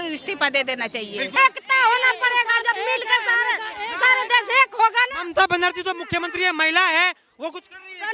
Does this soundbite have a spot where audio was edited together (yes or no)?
yes